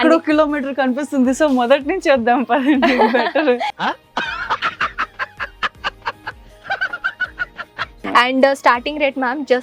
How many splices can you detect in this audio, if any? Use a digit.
1